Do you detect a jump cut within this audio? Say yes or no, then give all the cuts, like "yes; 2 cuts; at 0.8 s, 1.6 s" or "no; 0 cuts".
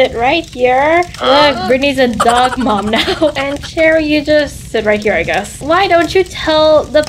yes; 2 cuts; at 1.6 s, 5.6 s